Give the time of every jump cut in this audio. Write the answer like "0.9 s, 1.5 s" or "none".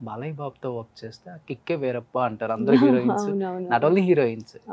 none